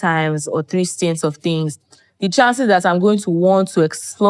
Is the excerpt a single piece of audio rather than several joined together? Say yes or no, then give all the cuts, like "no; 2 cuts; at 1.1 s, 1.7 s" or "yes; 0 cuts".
yes; 0 cuts